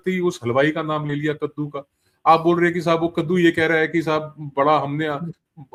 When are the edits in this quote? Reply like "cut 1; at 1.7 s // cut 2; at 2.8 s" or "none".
none

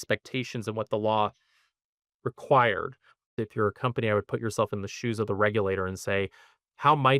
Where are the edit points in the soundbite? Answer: cut 1; at 3.4 s

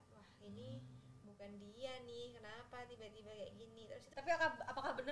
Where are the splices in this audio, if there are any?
cut 1; at 4.0 s

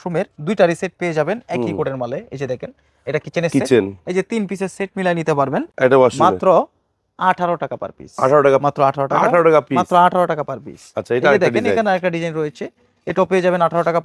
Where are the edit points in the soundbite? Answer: none

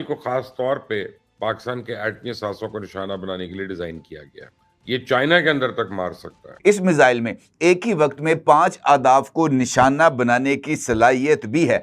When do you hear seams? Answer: cut 1; at 6.4 s

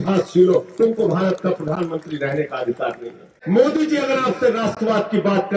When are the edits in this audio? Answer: cut 1; at 3.3 s

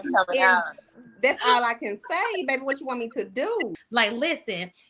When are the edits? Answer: cut 1; at 3.8 s

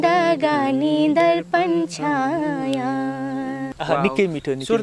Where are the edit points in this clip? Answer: cut 1; at 3.7 s

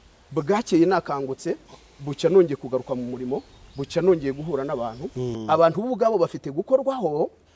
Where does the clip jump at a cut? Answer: cut 1; at 5.3 s

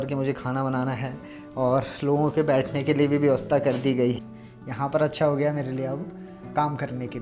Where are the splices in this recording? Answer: cut 1; at 4.2 s

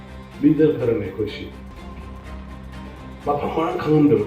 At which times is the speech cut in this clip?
cut 1; at 1.5 s // cut 2; at 2.9 s

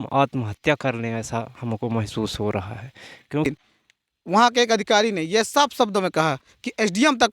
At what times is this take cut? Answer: cut 1; at 3.5 s

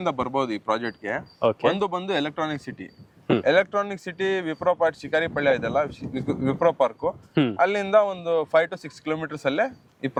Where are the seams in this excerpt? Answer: none

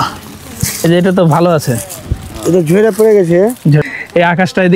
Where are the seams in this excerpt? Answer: cut 1; at 3.8 s

